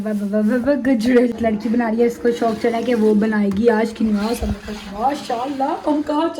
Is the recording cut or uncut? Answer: cut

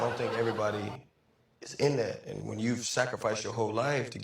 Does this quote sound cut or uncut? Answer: uncut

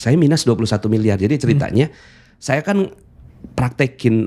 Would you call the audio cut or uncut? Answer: uncut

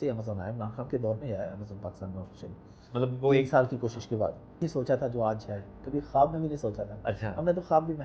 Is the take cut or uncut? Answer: cut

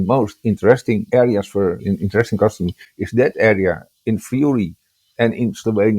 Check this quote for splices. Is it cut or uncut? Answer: cut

